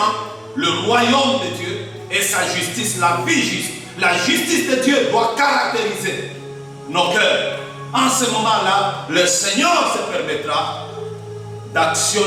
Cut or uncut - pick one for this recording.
uncut